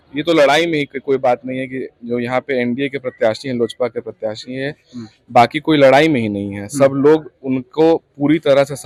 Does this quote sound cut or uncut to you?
uncut